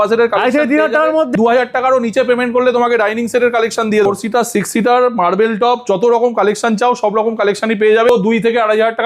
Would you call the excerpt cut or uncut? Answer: cut